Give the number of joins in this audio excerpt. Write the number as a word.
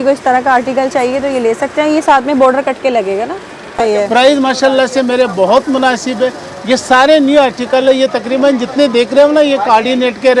one